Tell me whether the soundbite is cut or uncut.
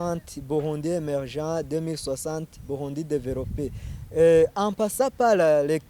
uncut